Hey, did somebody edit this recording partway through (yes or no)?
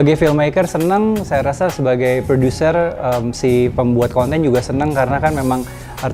no